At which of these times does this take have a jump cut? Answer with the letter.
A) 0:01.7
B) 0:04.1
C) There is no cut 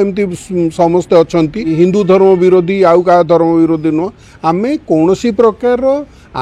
A